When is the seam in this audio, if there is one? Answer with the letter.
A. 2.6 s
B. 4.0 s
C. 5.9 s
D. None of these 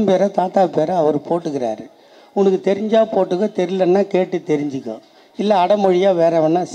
D